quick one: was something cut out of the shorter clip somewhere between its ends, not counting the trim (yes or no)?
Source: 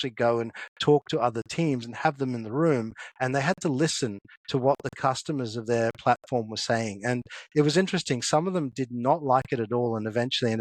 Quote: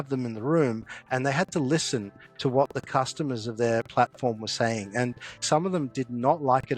yes